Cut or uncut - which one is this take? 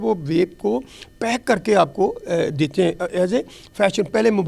uncut